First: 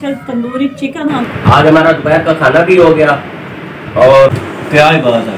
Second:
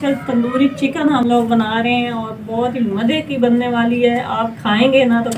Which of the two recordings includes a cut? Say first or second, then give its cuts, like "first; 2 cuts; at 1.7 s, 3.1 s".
first; 2 cuts; at 1.2 s, 4.3 s